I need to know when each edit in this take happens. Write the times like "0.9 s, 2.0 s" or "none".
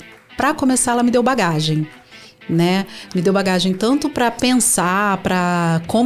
none